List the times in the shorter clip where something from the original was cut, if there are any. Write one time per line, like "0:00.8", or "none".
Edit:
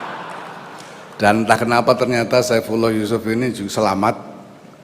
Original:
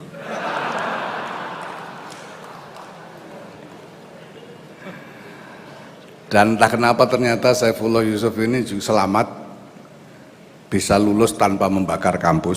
0:01.1

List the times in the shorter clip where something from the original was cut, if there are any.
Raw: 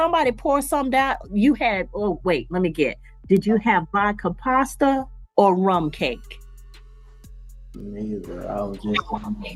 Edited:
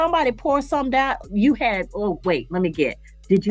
none

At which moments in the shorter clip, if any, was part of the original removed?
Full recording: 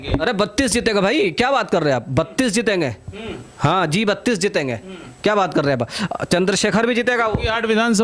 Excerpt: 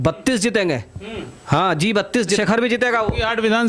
0:02.4

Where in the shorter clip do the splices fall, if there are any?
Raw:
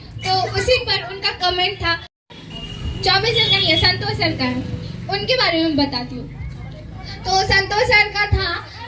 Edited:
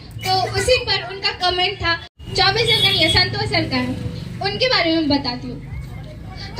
0:02.1

